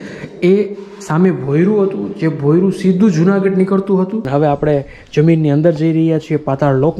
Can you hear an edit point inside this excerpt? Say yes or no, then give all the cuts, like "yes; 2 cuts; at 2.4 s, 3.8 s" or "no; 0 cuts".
yes; 1 cut; at 4.2 s